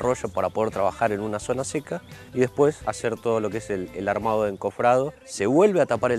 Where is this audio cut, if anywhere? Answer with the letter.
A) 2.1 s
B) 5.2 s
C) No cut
C